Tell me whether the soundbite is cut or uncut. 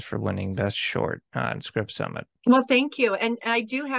cut